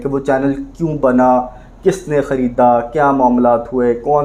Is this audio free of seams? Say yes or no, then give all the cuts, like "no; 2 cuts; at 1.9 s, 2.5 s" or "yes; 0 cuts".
yes; 0 cuts